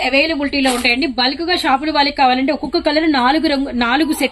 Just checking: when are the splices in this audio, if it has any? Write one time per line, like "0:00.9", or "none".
none

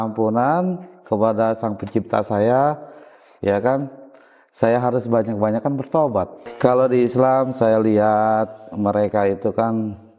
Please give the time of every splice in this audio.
0:06.4

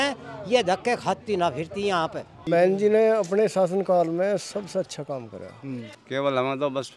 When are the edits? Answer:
0:02.4
0:06.0

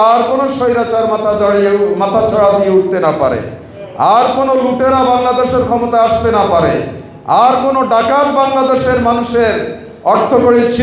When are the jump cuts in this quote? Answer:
none

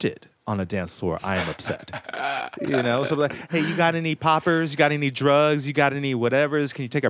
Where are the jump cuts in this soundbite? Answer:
0:02.5

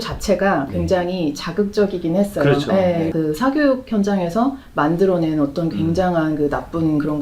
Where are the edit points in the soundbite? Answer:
0:03.1

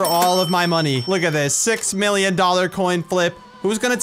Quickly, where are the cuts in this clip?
0:01.0

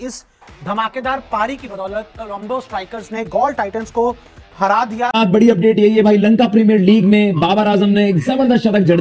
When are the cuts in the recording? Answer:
0:05.1

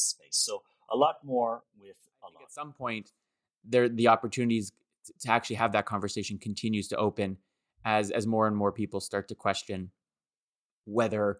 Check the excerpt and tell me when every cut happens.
0:02.5

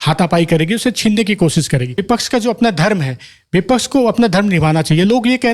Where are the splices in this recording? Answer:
0:02.0

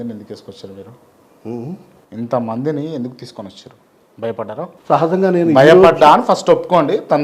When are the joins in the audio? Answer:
0:04.8

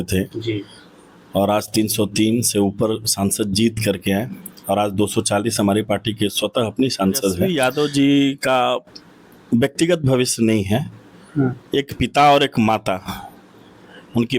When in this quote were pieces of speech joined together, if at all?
0:07.5

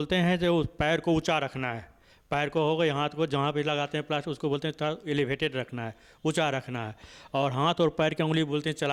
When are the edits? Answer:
none

